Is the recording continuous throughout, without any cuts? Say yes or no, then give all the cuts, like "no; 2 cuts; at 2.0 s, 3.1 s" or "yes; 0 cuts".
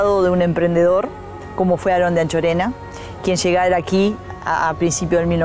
yes; 0 cuts